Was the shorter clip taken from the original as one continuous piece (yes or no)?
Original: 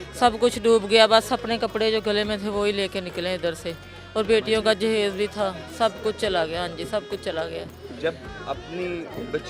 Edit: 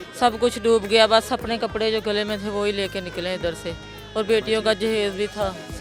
yes